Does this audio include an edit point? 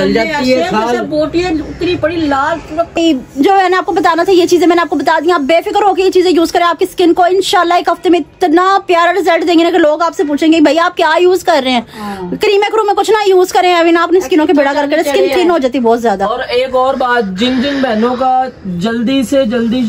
yes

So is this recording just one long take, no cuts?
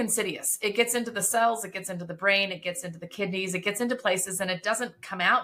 yes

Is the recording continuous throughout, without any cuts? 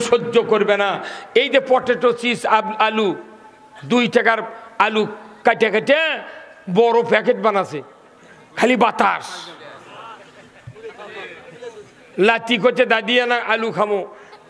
yes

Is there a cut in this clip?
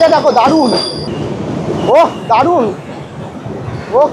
yes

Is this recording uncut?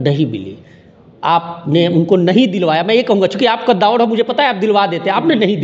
yes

